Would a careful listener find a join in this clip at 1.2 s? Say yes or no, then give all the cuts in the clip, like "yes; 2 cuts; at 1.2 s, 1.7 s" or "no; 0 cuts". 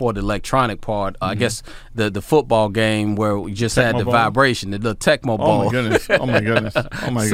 yes; 1 cut; at 1.2 s